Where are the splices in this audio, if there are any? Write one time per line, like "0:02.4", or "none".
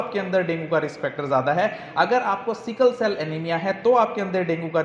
none